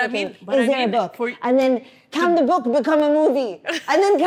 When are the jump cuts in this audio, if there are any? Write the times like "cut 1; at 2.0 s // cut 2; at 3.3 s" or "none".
none